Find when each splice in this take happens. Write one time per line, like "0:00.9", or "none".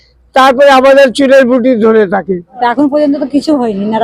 0:02.5